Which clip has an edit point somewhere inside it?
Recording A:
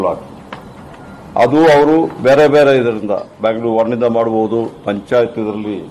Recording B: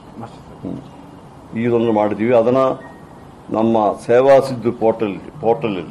B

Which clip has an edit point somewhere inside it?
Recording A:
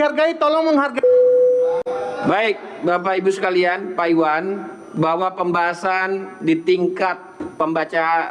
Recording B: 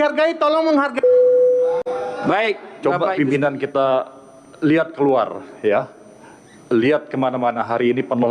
B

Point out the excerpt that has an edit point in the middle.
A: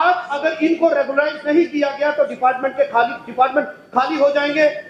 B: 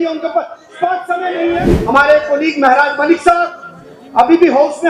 B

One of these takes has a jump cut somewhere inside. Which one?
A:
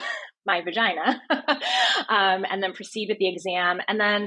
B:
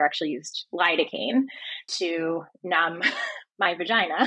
B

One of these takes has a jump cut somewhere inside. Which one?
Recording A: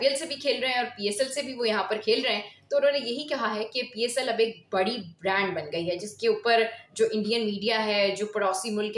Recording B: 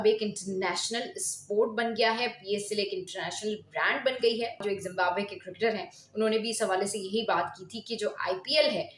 B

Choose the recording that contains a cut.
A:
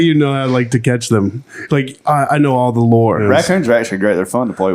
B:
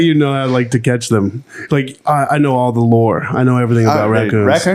A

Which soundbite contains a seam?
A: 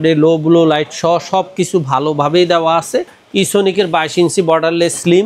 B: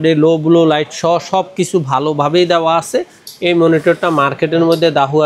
A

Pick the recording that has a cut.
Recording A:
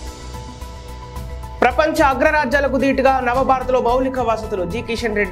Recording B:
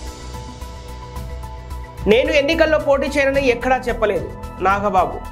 A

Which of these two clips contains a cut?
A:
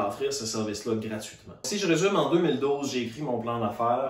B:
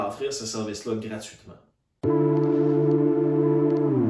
A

